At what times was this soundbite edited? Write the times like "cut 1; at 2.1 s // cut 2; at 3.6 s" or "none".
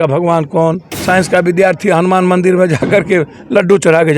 cut 1; at 0.9 s